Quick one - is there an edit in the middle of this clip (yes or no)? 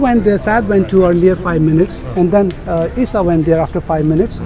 no